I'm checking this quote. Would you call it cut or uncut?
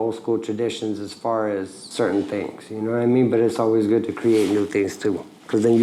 uncut